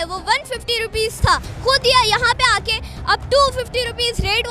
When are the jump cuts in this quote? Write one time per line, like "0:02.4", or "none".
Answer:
0:01.5